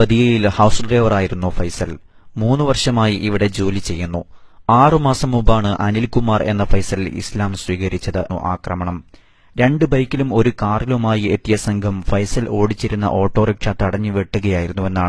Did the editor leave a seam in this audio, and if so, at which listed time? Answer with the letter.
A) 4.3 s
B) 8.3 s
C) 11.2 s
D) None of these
D